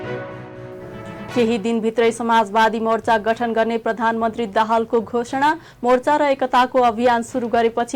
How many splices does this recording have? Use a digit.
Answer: 1